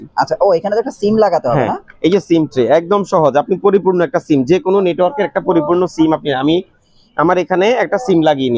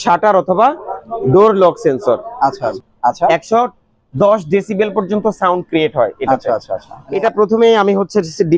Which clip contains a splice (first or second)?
second